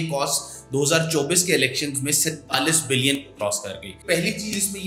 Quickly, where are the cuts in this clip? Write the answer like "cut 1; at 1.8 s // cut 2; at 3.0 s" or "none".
cut 1; at 4.0 s